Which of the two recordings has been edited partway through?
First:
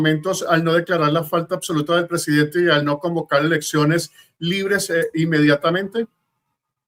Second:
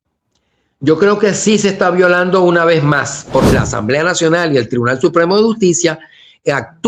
second; 1 cut; at 3.5 s

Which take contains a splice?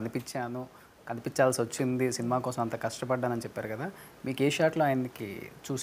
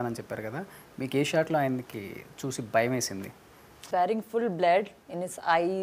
second; 1 cut; at 3.8 s

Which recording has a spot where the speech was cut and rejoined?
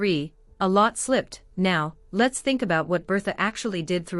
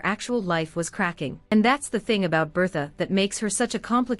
second; 1 cut; at 1.5 s

